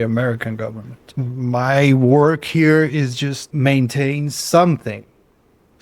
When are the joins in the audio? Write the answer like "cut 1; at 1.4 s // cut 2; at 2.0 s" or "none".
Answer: cut 1; at 1.2 s // cut 2; at 3.4 s